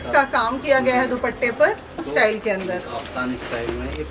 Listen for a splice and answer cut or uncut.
cut